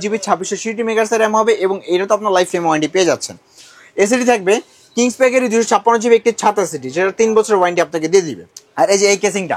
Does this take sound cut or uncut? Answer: uncut